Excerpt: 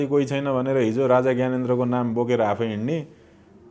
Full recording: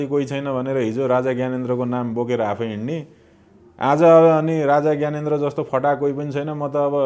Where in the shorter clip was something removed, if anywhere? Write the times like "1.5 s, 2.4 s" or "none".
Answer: none